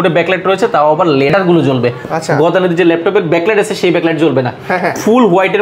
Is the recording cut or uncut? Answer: uncut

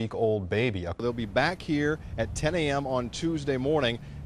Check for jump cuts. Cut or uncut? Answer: cut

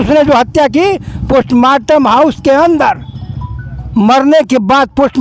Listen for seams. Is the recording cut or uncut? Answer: uncut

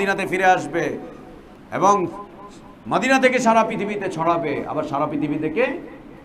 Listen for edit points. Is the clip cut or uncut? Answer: uncut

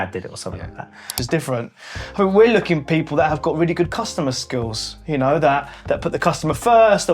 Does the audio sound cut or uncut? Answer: cut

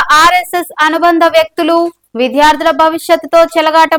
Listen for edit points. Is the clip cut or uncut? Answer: uncut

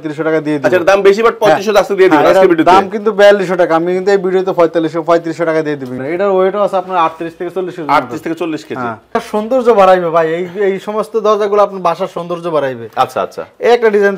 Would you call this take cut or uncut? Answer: cut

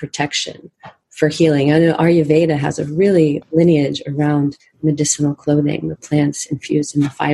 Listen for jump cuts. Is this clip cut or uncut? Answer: cut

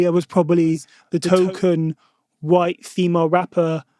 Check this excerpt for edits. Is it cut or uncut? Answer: cut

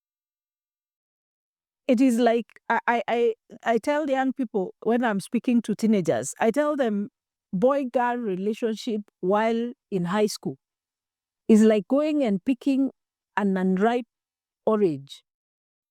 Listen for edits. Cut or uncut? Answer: uncut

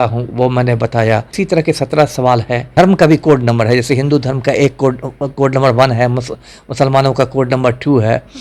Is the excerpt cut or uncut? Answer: cut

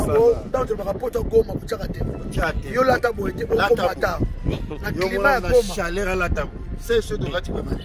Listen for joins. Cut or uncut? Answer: uncut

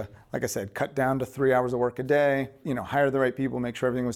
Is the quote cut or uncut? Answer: cut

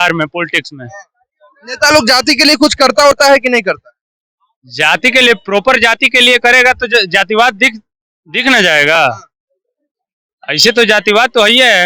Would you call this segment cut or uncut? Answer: uncut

